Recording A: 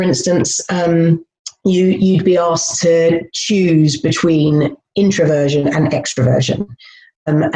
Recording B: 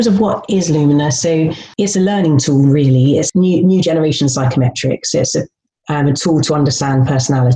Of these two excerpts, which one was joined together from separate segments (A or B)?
B